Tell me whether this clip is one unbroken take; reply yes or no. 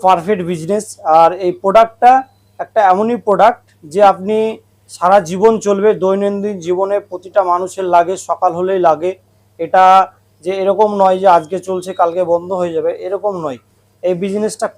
yes